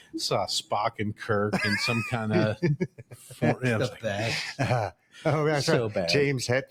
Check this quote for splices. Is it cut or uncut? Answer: uncut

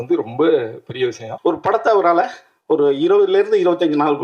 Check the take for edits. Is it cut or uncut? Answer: cut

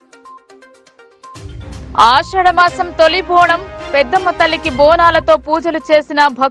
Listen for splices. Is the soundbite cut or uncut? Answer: uncut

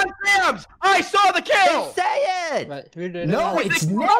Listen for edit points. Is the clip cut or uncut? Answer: uncut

